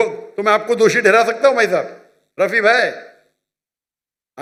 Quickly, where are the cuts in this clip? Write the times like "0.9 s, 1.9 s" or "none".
none